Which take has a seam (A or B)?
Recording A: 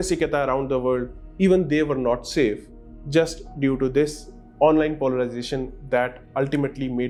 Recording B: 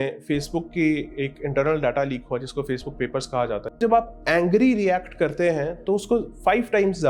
B